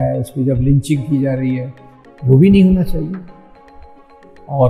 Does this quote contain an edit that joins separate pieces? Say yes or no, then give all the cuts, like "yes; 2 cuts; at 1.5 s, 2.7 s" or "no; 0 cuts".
no; 0 cuts